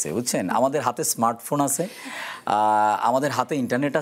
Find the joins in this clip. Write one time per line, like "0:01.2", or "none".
none